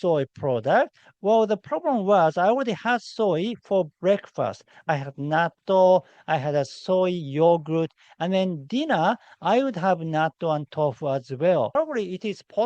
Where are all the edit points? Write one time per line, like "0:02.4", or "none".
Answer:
0:11.7